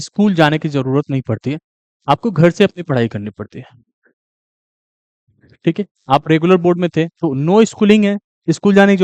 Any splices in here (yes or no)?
no